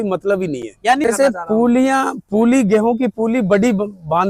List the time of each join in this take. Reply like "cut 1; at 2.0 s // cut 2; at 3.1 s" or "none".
cut 1; at 1.1 s